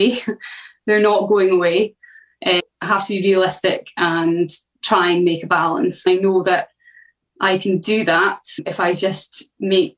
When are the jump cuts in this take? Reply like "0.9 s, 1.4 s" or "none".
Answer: 2.6 s, 4.7 s, 6.1 s